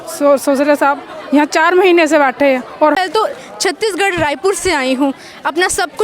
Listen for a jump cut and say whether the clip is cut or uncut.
cut